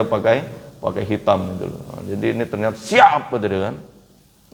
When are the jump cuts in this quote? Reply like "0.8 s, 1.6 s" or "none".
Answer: none